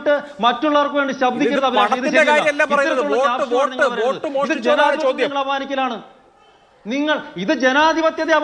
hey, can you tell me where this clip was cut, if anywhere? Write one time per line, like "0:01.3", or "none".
none

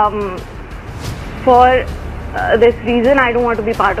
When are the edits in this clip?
none

